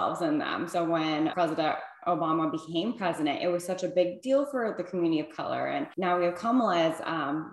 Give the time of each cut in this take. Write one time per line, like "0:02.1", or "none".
0:01.3
0:05.9